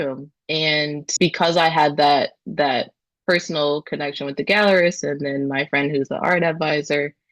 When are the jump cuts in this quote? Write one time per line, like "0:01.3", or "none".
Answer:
0:01.1